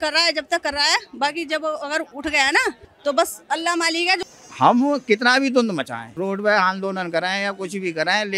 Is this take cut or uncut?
cut